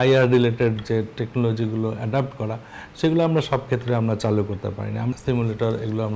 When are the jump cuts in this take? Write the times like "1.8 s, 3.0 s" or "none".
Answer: 5.2 s